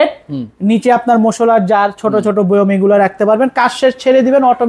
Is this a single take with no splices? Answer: yes; 0 cuts

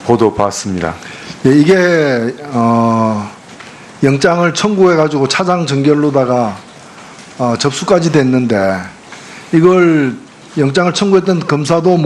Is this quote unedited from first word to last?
yes; 0 cuts

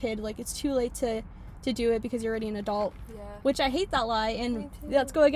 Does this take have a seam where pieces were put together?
no; 0 cuts

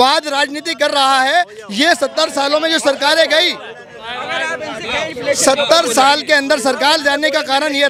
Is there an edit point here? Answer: no; 0 cuts

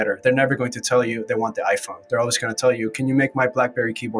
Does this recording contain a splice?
no; 0 cuts

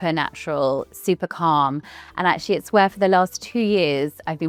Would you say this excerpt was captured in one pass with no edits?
yes; 0 cuts

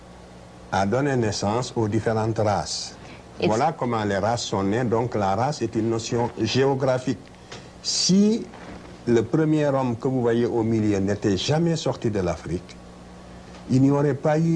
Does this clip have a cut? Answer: no; 0 cuts

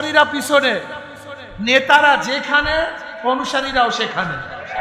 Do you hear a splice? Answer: no; 0 cuts

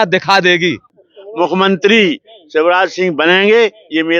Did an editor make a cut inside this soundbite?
yes; 1 cut; at 0.9 s

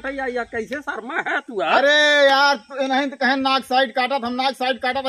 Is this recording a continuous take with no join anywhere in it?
yes; 0 cuts

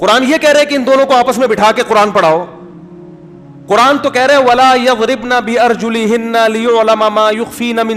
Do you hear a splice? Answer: no; 0 cuts

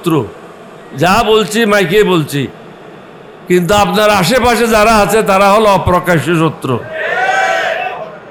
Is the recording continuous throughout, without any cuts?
yes; 0 cuts

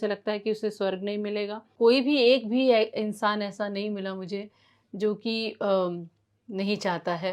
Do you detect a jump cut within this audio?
yes; 1 cut; at 1.6 s

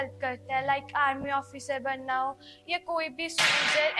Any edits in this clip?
no; 0 cuts

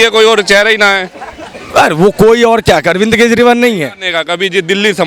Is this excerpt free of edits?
yes; 0 cuts

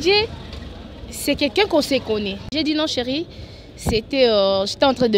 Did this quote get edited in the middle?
yes; 1 cut; at 2.4 s

